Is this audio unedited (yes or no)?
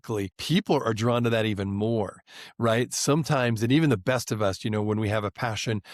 yes